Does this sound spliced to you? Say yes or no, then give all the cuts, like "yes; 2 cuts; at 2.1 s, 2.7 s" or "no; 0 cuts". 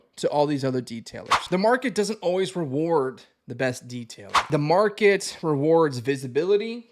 yes; 2 cuts; at 1.3 s, 4.4 s